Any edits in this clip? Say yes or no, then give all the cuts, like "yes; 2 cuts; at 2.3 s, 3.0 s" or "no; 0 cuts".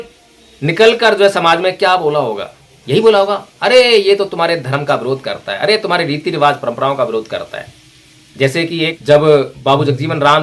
yes; 1 cut; at 9.0 s